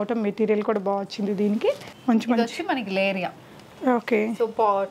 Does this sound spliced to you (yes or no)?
yes